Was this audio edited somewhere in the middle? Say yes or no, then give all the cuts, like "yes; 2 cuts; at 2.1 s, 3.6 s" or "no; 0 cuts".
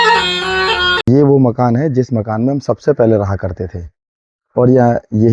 yes; 1 cut; at 1.0 s